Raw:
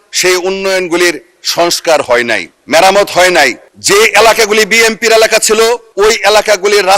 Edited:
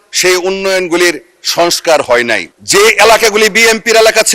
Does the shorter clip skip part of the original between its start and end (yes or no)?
yes